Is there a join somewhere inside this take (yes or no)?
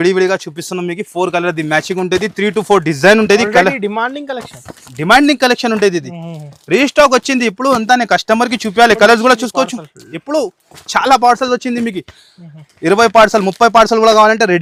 no